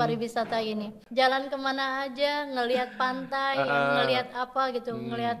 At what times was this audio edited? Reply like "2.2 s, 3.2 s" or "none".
1.0 s